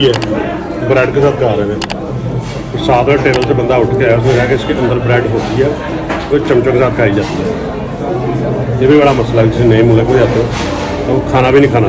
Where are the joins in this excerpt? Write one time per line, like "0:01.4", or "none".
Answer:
none